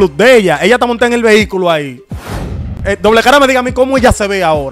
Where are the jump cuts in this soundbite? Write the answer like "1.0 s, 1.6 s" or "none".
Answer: 2.5 s

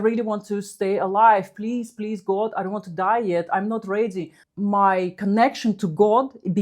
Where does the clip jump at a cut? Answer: 4.4 s

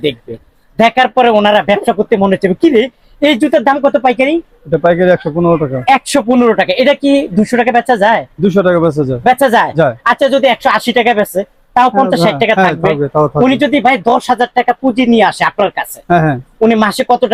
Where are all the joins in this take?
none

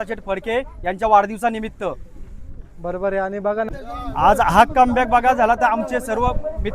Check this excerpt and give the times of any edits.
3.7 s

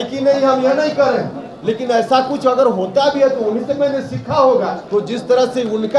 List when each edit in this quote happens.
4.8 s

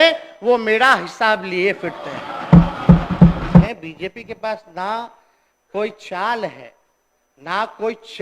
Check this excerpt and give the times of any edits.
3.7 s

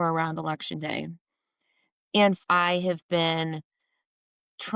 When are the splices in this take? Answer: 2.4 s

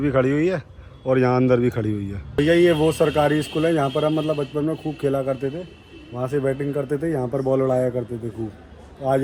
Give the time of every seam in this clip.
none

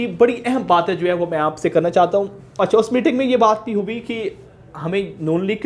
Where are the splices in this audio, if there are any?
2.4 s

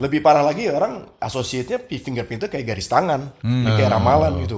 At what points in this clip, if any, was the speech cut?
3.3 s

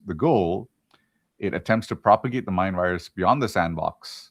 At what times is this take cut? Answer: none

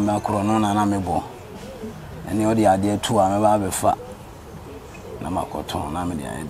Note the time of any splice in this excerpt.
none

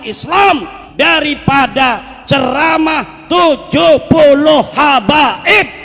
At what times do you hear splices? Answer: none

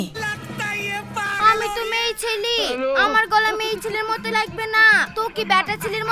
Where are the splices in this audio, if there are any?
none

